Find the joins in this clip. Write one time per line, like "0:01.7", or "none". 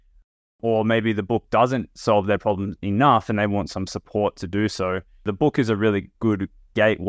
0:05.2